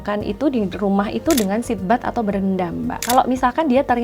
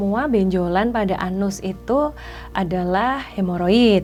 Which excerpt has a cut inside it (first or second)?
first